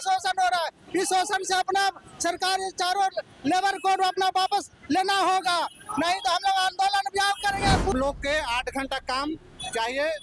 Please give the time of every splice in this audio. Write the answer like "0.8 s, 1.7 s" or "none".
7.9 s

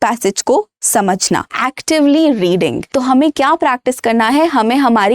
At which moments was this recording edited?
1.5 s, 2.8 s

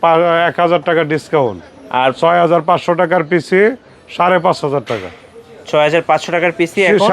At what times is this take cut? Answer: none

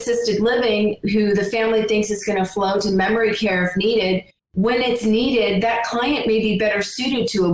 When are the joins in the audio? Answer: 4.4 s

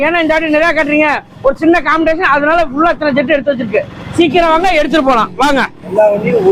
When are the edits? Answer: none

